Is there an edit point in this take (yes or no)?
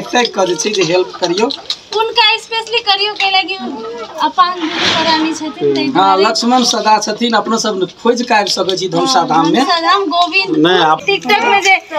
yes